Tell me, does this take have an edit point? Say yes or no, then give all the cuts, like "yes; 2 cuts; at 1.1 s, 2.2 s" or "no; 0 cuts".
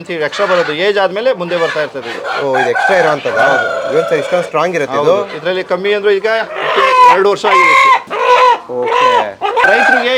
no; 0 cuts